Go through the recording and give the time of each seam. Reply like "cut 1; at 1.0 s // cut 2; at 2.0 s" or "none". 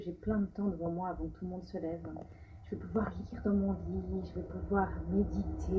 cut 1; at 2.6 s